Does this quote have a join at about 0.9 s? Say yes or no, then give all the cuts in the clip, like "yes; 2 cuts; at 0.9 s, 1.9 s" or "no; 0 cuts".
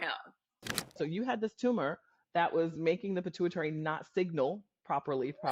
yes; 1 cut; at 0.9 s